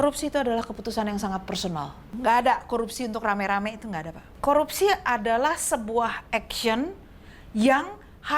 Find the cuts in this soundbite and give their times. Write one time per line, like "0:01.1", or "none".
0:02.0
0:04.3